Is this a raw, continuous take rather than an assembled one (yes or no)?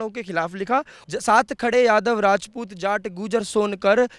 no